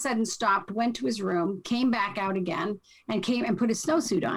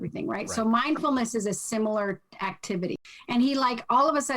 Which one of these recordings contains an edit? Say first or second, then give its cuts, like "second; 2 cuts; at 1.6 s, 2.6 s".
second; 1 cut; at 3.0 s